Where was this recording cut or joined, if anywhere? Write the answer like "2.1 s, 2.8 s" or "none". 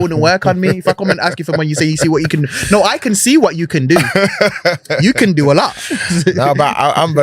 none